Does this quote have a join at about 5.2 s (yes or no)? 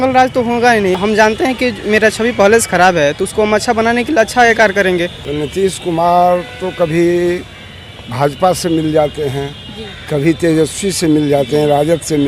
yes